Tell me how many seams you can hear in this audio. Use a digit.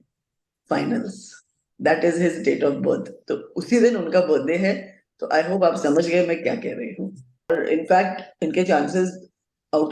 1